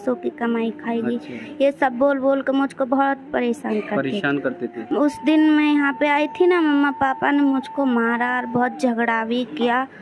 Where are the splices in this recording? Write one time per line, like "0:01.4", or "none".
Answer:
0:04.7